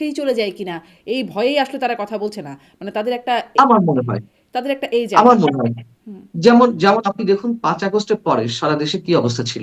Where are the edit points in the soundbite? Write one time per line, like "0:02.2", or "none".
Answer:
none